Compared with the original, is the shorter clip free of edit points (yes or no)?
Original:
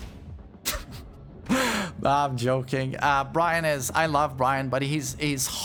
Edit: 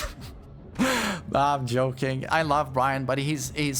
no